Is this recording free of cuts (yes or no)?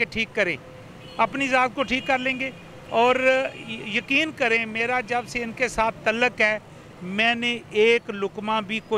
yes